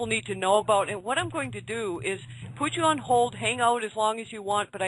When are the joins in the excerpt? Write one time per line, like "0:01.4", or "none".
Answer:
0:01.1